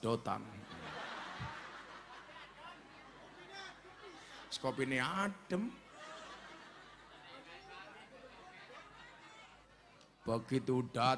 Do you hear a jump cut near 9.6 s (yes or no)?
yes